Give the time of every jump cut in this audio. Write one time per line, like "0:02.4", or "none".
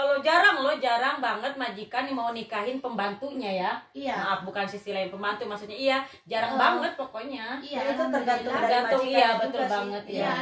none